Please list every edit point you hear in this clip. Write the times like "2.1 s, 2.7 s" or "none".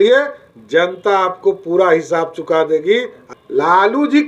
3.2 s